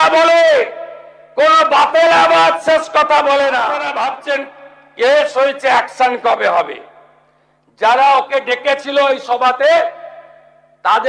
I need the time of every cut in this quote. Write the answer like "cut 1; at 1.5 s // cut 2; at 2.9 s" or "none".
cut 1; at 3.9 s